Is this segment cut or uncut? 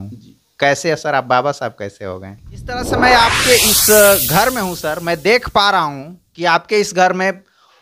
cut